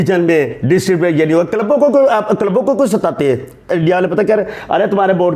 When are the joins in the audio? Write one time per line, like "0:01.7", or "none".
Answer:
0:03.7